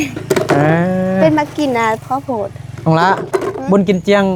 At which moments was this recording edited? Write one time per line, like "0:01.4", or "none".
none